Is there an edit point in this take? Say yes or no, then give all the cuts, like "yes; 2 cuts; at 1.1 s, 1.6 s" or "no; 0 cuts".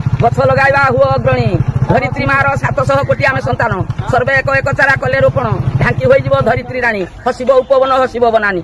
no; 0 cuts